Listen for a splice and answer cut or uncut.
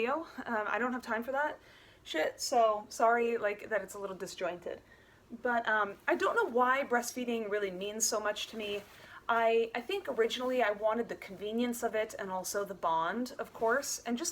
uncut